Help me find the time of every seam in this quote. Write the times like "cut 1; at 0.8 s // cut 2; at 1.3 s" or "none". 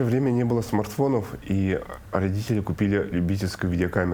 none